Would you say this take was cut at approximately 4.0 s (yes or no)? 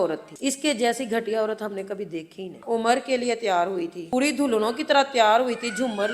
yes